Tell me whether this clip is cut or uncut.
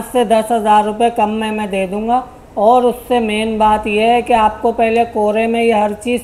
uncut